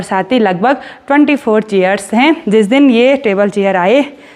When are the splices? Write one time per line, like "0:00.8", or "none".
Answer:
0:02.4